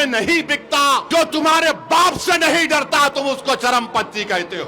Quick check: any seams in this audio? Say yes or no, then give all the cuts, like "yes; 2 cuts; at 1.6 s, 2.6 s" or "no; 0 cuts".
yes; 1 cut; at 1.1 s